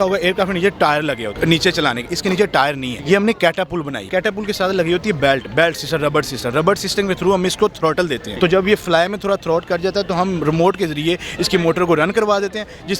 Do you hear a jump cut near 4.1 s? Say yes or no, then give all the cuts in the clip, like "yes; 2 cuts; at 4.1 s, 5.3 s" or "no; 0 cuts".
yes; 4 cuts; at 1.3 s, 2.9 s, 4.1 s, 8.2 s